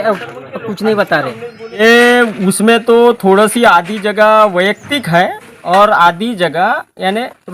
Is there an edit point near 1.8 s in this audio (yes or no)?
yes